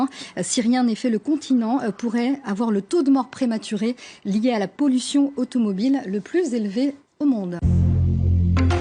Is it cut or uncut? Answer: cut